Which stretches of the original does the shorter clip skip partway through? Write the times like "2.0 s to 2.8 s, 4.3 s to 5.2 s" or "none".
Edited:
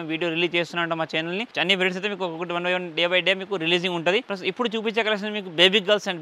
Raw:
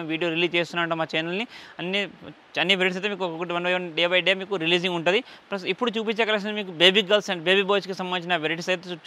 1.5 s to 2.5 s, 5.3 s to 5.5 s